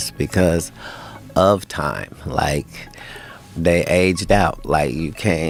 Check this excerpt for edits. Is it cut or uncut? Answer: uncut